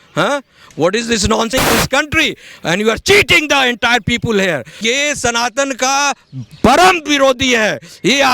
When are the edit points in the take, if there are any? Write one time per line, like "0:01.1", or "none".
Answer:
0:01.5
0:04.8